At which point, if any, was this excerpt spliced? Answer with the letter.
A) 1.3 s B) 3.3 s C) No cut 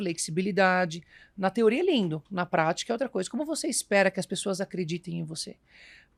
C